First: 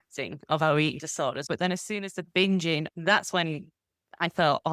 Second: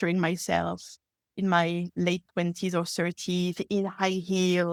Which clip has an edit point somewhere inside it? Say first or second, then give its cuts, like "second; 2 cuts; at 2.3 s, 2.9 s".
first; 2 cuts; at 1.4 s, 2.8 s